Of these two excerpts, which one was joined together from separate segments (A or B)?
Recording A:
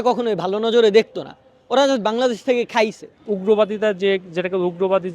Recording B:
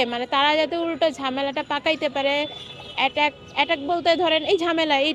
A